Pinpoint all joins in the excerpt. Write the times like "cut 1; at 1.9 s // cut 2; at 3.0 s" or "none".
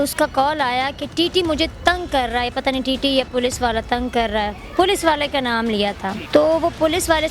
cut 1; at 6.2 s